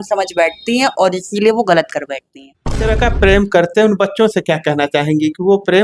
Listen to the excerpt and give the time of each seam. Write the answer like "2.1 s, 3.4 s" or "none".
2.8 s